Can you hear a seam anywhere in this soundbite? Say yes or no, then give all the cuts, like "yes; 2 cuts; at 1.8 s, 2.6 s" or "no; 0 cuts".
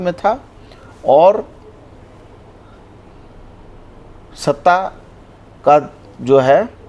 no; 0 cuts